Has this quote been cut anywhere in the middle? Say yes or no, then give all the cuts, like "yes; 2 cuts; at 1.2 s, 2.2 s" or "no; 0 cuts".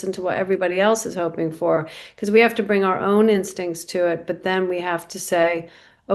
no; 0 cuts